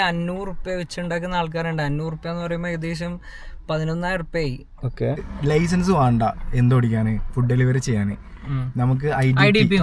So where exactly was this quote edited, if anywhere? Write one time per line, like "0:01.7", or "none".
0:05.2